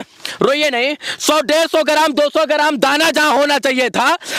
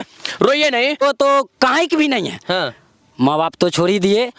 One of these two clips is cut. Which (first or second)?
second